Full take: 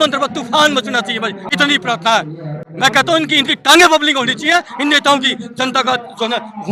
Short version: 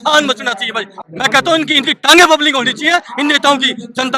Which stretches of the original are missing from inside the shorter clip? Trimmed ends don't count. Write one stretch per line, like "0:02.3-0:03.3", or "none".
0:01.4-0:02.6

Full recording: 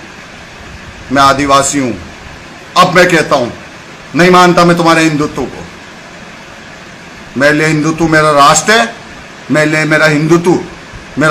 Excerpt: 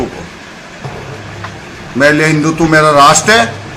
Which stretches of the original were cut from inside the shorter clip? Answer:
none

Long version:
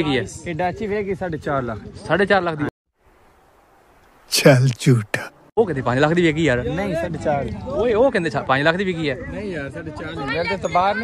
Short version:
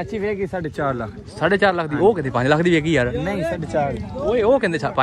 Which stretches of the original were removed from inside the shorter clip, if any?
0:02.6-0:05.5

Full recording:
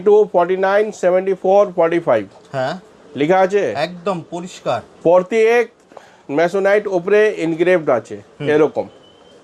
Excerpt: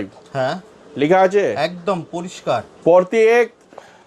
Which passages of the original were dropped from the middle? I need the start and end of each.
none

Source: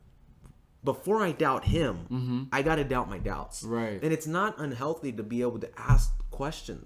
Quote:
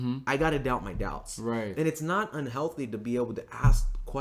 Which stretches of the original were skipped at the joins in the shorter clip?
none

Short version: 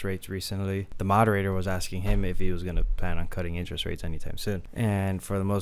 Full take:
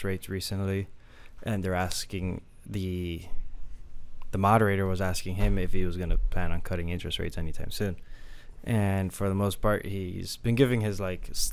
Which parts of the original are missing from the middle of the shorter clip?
0:00.9-0:04.2
0:08.0-0:08.6

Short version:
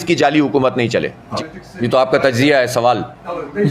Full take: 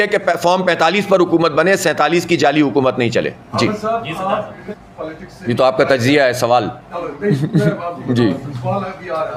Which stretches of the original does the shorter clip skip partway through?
0:03.4-0:04.9

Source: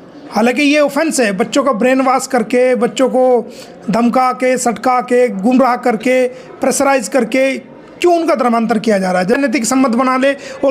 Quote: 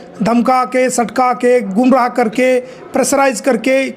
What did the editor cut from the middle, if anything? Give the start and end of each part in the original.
none

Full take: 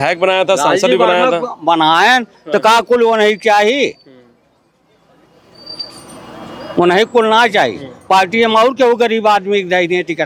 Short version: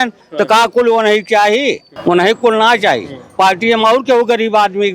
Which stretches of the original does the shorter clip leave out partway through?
0:04.0-0:06.6

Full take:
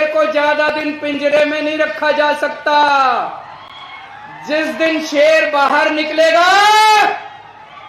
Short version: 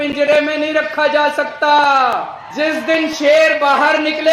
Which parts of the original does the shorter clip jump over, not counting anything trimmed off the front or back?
0:03.4-0:04.3

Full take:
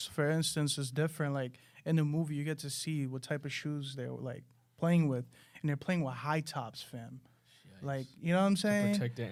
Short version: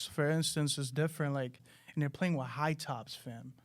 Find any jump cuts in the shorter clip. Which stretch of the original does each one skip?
0:01.7-0:05.4

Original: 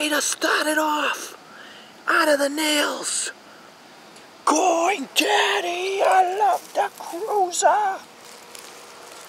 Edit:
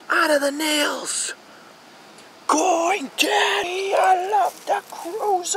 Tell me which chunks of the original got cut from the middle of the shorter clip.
0:05.6-0:05.7

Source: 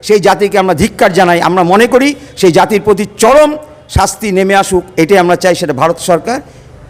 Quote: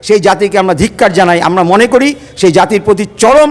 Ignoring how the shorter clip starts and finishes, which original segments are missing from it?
none

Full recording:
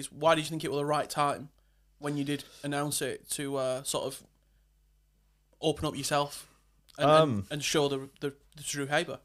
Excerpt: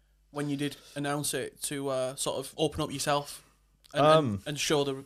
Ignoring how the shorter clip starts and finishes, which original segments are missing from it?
0:04.2-0:05.5

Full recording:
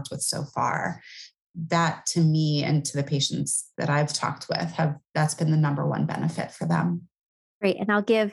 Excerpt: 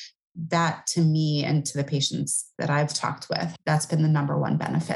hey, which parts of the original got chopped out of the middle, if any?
0:04.7-0:05.0

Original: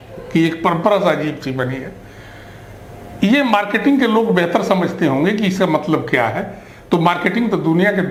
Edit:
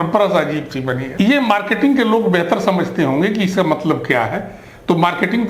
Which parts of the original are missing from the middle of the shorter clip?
0:01.8-0:03.1

